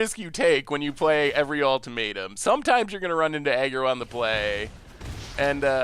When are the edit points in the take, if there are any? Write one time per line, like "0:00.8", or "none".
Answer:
none